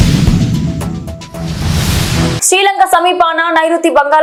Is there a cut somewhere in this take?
no; 0 cuts

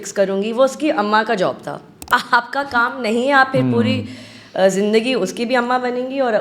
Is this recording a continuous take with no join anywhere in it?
no; 1 cut; at 2.2 s

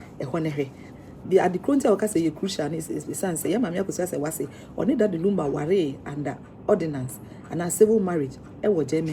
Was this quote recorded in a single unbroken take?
no; 1 cut; at 1.0 s

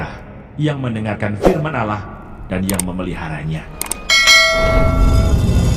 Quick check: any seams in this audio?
no; 0 cuts

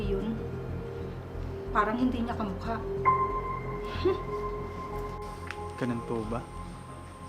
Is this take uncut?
yes; 0 cuts

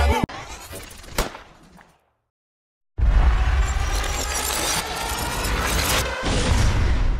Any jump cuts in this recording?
no; 0 cuts

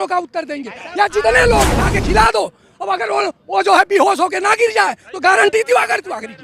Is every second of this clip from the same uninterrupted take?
no; 1 cut; at 1.8 s

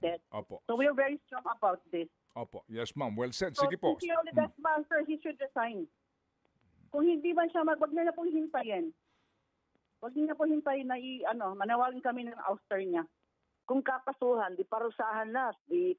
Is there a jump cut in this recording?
yes; 1 cut; at 13.5 s

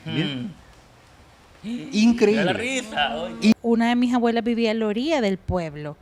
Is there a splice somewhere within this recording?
yes; 1 cut; at 3.5 s

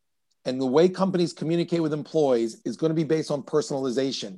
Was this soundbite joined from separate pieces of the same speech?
no; 0 cuts

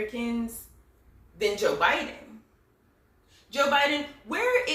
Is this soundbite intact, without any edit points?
yes; 0 cuts

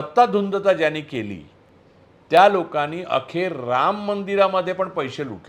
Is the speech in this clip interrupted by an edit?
no; 0 cuts

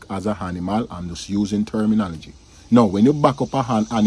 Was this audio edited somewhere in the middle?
no; 0 cuts

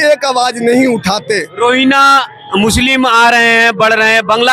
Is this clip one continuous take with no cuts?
no; 1 cut; at 1.5 s

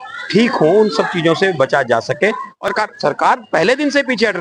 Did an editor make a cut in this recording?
yes; 1 cut; at 2.7 s

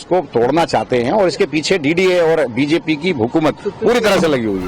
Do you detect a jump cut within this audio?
no; 0 cuts

